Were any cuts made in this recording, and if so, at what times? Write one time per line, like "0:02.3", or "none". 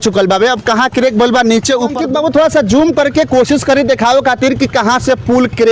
0:02.0